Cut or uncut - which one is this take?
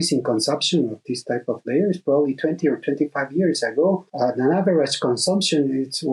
cut